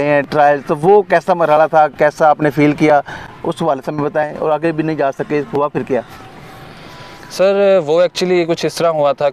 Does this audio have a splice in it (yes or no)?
no